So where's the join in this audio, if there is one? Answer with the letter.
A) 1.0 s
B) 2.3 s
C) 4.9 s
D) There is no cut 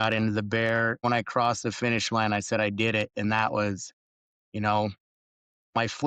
A